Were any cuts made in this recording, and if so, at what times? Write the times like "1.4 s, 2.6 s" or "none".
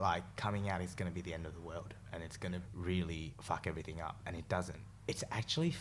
2.7 s, 3.3 s, 4.8 s